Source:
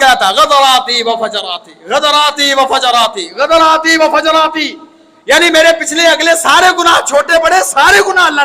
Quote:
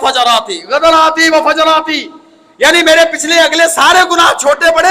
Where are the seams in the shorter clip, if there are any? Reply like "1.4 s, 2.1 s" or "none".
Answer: none